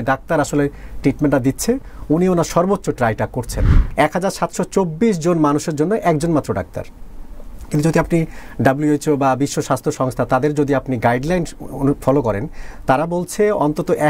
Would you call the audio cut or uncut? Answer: cut